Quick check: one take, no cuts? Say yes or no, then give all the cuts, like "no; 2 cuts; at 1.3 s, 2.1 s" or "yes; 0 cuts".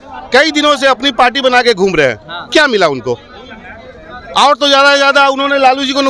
yes; 0 cuts